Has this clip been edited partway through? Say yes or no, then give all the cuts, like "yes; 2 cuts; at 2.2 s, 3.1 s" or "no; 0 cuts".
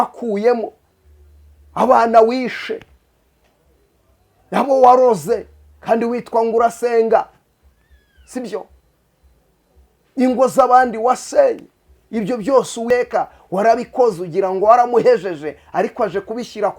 yes; 1 cut; at 12.9 s